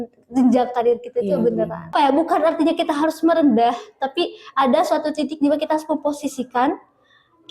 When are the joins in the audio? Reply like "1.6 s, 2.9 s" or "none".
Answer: 1.9 s